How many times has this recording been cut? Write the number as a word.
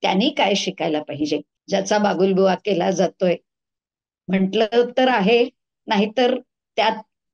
one